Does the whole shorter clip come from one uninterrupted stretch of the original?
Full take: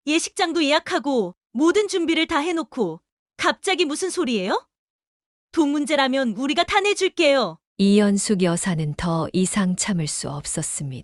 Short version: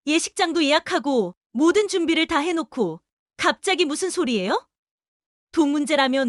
yes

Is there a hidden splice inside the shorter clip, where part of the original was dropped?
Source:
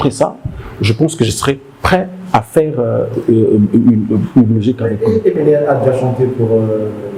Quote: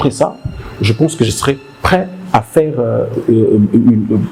no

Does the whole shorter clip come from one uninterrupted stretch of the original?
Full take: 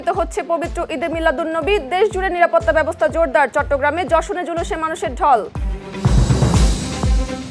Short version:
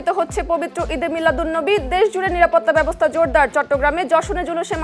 yes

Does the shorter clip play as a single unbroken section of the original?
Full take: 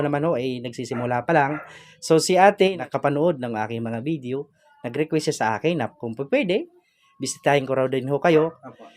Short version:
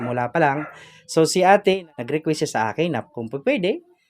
no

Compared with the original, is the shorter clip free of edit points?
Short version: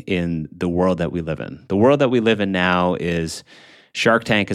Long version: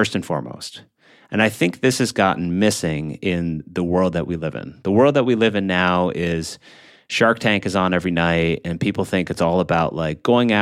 yes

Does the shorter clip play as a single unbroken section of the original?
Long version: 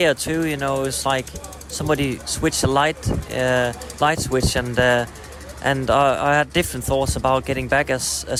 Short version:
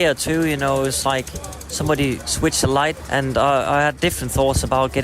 no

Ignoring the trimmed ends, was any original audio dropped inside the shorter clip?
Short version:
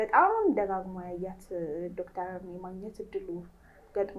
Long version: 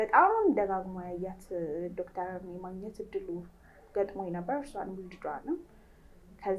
no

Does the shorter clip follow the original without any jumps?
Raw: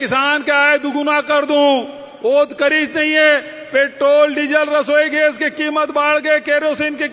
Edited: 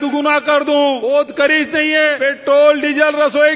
no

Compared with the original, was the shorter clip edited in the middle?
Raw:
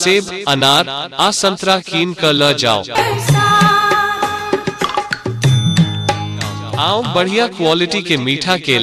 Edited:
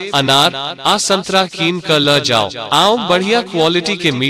yes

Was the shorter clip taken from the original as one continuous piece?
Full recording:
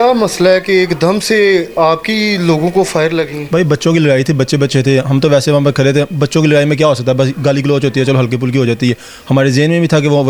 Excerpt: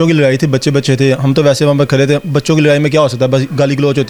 yes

